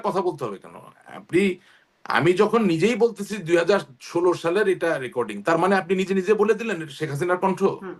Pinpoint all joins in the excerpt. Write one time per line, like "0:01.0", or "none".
none